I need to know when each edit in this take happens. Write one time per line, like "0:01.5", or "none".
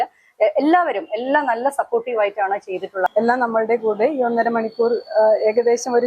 0:03.1